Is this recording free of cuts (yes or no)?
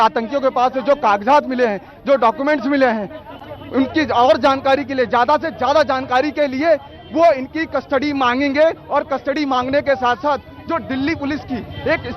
yes